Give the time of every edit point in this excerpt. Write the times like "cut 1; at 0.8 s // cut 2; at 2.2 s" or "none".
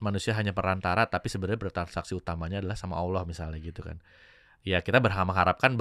none